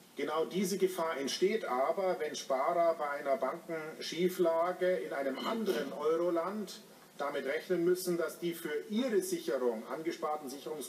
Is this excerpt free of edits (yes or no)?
no